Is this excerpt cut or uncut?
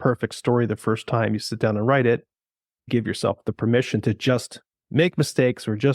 cut